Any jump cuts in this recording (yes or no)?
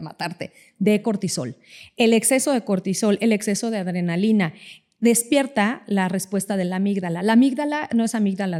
no